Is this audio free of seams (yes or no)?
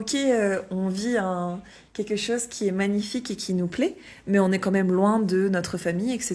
yes